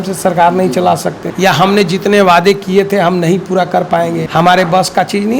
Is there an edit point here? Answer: yes; 2 cuts; at 1.2 s, 4.2 s

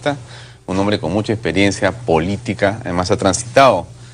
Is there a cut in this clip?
no; 0 cuts

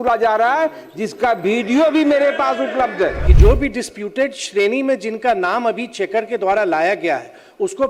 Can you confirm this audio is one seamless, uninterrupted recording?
no; 1 cut; at 3.2 s

